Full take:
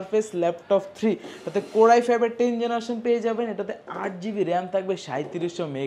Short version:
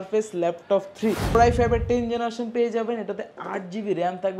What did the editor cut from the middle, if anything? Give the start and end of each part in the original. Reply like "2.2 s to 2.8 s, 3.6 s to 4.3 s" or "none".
1.4 s to 1.9 s